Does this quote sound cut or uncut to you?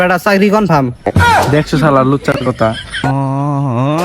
cut